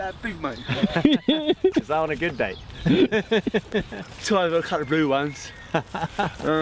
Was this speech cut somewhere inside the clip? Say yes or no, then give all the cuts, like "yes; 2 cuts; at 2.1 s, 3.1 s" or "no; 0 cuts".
no; 0 cuts